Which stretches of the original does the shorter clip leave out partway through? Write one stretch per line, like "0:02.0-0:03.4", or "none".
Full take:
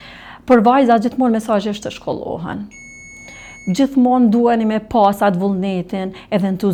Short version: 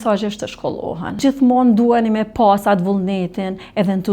0:02.6-0:03.8